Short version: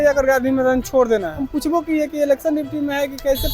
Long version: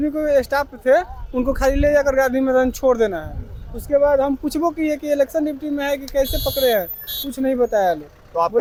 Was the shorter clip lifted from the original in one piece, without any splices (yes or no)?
no